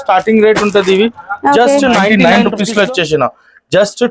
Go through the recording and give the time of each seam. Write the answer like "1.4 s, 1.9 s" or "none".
2.2 s